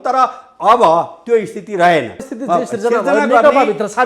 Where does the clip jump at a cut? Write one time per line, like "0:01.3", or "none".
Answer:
0:02.3